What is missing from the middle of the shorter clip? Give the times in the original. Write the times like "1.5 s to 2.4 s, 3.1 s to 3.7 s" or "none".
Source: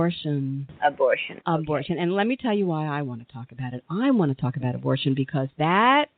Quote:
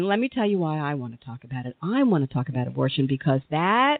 none